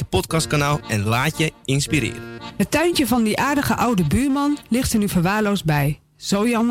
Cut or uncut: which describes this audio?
cut